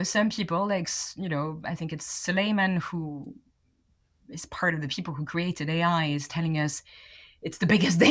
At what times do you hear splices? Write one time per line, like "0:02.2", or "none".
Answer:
none

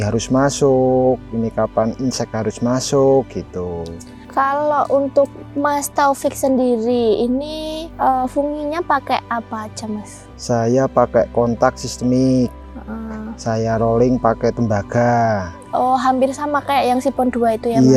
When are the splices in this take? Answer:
none

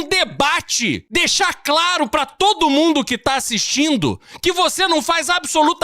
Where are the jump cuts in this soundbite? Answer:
0:01.0

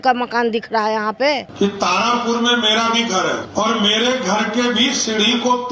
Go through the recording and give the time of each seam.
0:01.5
0:03.5

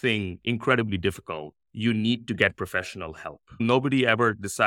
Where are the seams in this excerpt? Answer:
0:03.6

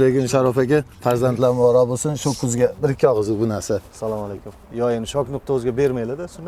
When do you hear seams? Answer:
none

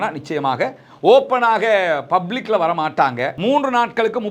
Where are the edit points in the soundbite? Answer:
0:03.3

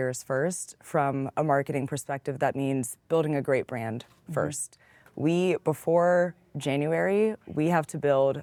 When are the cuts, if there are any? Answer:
none

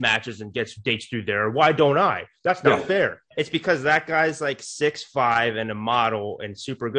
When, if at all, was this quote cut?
0:03.2

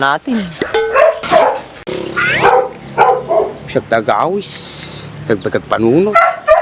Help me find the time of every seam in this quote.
0:01.7

